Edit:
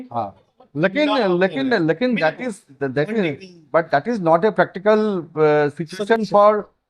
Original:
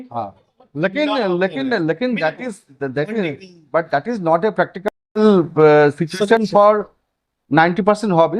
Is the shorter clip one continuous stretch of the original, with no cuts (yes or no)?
no